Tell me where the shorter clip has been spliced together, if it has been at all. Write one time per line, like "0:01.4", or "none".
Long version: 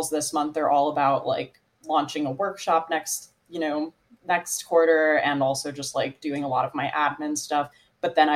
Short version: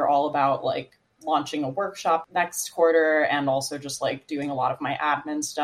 0:02.2